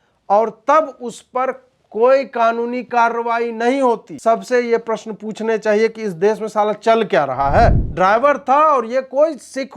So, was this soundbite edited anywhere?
yes; 2 cuts; at 4.1 s, 7.8 s

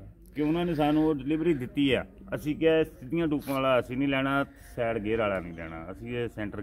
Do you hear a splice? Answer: no; 0 cuts

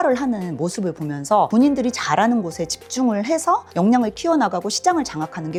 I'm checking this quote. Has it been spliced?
no; 0 cuts

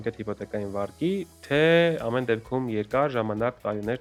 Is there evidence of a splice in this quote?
no; 0 cuts

